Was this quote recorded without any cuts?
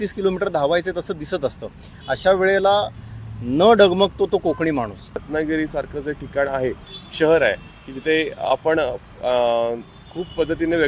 no; 1 cut; at 5.3 s

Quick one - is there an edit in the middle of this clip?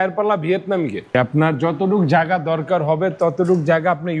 yes; 1 cut; at 1.1 s

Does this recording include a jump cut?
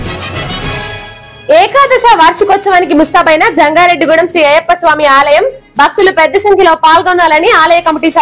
yes; 1 cut; at 1.2 s

